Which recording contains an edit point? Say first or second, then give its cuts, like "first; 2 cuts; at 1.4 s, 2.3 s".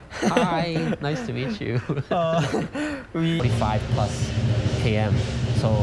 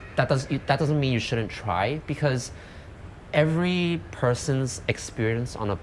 first; 1 cut; at 3.4 s